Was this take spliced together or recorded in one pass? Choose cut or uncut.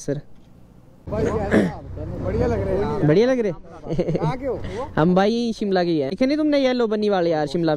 cut